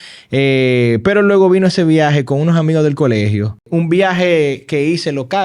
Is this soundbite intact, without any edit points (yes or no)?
no